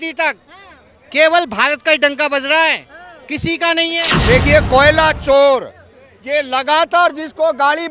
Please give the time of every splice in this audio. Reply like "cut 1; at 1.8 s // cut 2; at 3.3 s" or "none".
cut 1; at 4.1 s